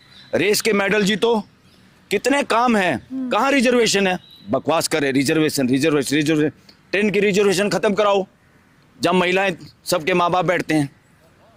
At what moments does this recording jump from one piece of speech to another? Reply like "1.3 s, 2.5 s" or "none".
none